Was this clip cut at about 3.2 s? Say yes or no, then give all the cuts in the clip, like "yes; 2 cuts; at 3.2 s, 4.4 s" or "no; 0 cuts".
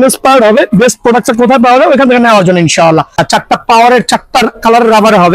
yes; 1 cut; at 3.2 s